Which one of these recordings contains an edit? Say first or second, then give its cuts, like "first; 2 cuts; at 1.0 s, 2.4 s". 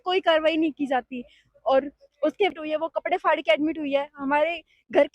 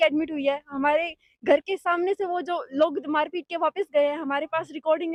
first; 1 cut; at 2.5 s